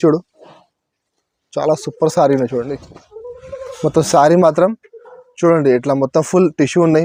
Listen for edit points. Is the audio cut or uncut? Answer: uncut